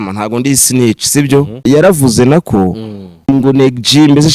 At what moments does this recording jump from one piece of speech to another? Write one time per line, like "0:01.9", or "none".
0:01.6
0:03.3